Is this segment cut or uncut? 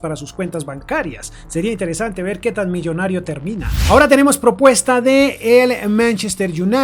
cut